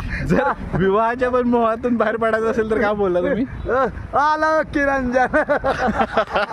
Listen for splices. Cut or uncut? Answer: uncut